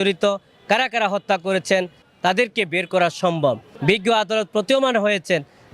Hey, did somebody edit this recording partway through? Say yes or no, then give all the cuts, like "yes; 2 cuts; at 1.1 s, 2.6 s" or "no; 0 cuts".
yes; 2 cuts; at 2.0 s, 3.7 s